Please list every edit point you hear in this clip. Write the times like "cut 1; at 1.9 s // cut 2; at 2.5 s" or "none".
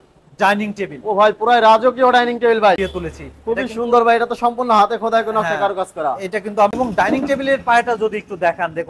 cut 1; at 2.8 s // cut 2; at 6.7 s